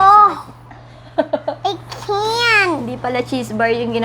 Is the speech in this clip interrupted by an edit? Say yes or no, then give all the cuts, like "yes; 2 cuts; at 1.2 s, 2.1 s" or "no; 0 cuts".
no; 0 cuts